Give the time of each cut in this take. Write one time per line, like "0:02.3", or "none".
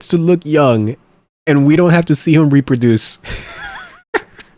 none